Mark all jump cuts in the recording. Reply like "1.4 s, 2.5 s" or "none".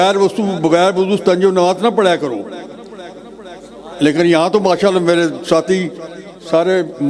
none